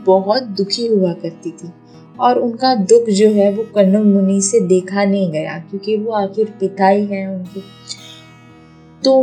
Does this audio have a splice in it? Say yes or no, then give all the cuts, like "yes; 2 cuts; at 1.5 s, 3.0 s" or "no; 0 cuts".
no; 0 cuts